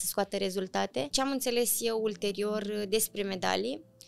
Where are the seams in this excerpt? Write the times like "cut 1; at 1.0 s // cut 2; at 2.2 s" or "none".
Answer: cut 1; at 1.1 s